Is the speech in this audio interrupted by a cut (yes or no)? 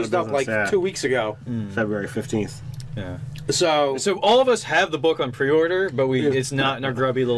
yes